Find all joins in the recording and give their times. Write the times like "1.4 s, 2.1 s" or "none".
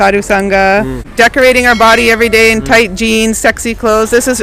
1.0 s